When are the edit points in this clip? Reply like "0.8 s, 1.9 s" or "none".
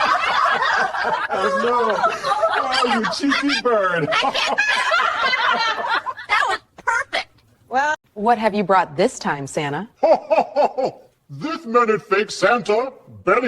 8.1 s